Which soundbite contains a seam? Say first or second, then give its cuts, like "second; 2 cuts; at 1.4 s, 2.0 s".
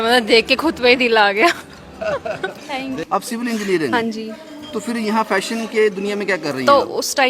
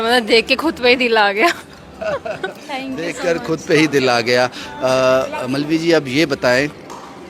first; 1 cut; at 3.0 s